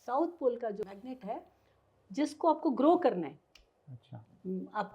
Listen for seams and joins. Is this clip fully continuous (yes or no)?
no